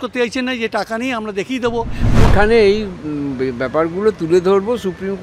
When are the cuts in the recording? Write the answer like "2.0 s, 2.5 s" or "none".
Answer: 2.3 s